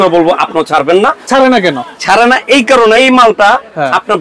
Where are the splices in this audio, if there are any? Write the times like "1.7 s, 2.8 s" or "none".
1.2 s, 3.0 s